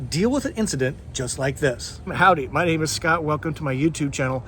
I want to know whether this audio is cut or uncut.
cut